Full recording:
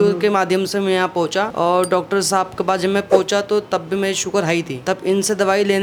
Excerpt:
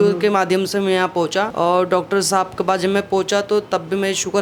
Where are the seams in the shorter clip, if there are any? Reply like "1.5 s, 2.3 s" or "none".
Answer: none